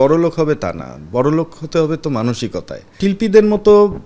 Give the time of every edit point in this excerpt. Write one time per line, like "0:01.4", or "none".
0:02.9